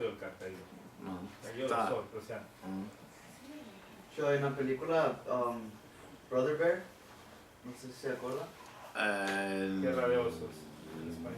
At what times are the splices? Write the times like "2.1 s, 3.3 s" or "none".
5.0 s